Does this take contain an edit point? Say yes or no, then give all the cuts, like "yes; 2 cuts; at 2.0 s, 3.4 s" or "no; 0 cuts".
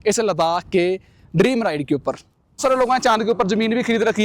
yes; 1 cut; at 2.6 s